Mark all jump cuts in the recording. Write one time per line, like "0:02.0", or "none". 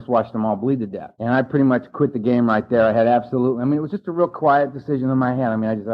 0:01.0